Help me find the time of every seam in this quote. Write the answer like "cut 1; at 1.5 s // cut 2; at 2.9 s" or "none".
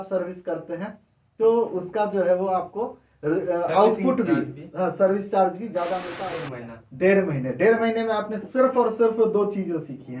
cut 1; at 6.2 s